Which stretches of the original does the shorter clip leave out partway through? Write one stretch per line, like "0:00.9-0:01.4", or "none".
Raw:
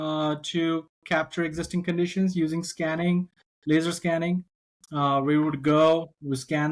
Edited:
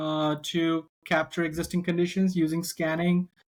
none

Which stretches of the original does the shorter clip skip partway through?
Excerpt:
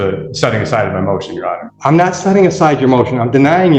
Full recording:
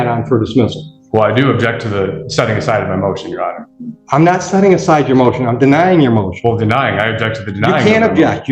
0:03.6-0:03.9

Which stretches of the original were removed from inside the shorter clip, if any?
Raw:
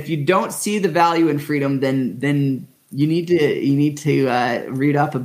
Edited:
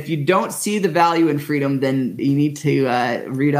0:02.2-0:03.6

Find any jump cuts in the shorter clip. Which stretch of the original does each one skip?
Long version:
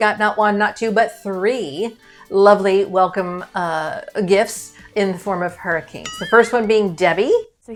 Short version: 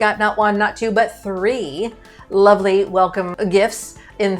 0:03.3-0:04.1

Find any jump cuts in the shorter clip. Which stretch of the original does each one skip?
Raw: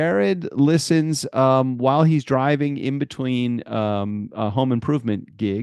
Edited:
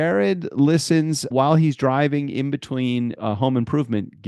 0:01.3-0:01.7
0:03.6-0:04.3

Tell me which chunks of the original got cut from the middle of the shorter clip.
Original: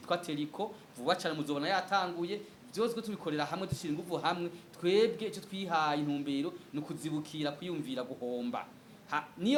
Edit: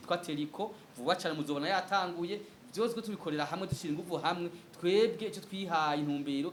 none

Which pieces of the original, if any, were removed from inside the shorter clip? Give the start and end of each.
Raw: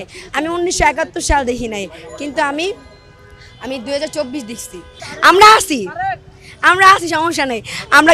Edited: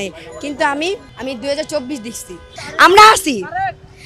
0:02.9-0:03.5

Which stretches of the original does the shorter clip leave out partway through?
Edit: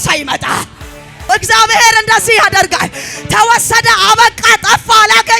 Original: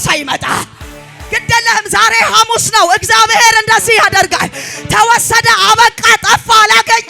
0:01.3-0:02.9

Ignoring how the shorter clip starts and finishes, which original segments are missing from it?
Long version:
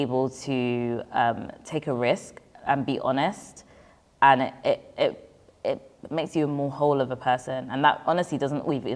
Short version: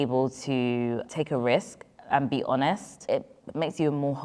0:01.0-0:01.6
0:03.5-0:05.5

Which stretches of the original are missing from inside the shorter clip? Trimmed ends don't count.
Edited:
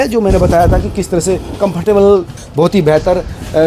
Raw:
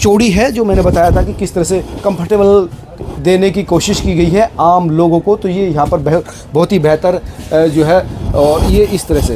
0:02.8-0:06.4

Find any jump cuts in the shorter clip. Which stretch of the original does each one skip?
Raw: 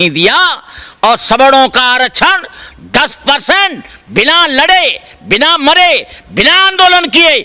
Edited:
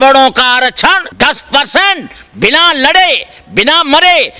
0:02.4-0:02.8

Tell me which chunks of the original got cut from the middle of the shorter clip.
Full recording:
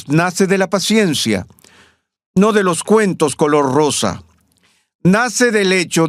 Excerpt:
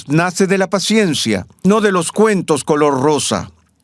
0:01.5-0:02.2

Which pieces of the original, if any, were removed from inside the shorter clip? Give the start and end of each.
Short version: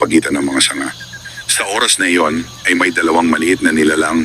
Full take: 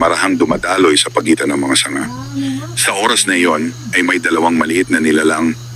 0:02.4-0:02.5

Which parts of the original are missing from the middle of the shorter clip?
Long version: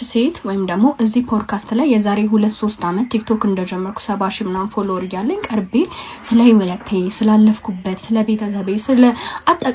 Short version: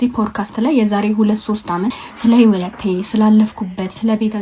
0:03.1-0:06.0

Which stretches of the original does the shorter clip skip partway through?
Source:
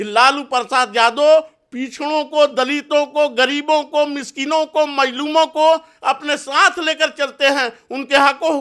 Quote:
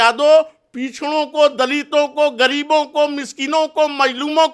none

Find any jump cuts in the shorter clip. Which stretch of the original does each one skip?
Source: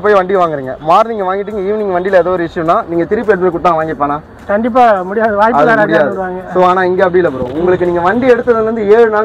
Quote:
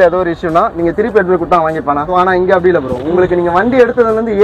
0:04.2-0:06.6

